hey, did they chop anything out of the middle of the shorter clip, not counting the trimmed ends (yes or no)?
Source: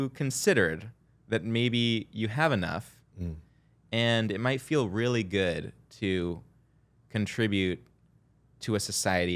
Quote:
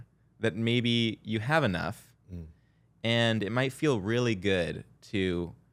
no